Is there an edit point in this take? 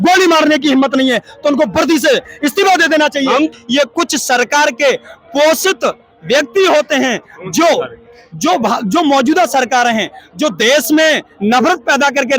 yes; 1 cut; at 3.5 s

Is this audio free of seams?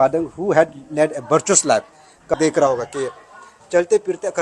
no; 1 cut; at 2.3 s

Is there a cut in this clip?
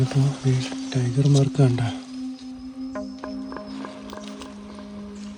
no; 0 cuts

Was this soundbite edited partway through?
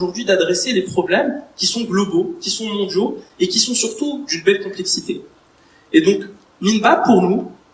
no; 0 cuts

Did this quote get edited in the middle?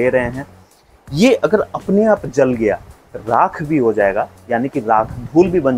no; 0 cuts

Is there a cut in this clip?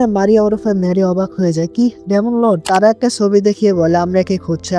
yes; 1 cut; at 2.6 s

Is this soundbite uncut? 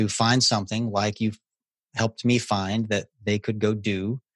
yes; 0 cuts

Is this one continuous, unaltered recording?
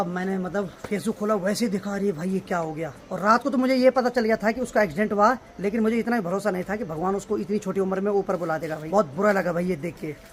yes; 0 cuts

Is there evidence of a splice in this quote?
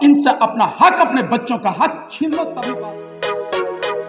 yes; 1 cut; at 2.6 s

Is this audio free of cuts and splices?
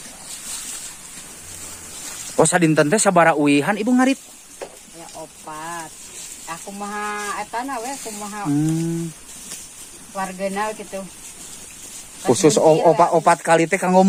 yes; 0 cuts

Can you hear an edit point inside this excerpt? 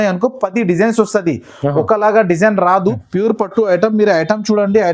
yes; 1 cut; at 3.0 s

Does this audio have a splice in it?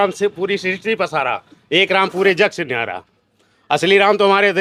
no; 0 cuts

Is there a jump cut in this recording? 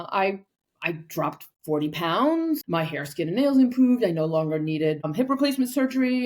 yes; 2 cuts; at 2.6 s, 5.1 s

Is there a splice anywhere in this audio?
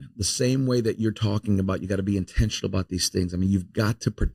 no; 0 cuts

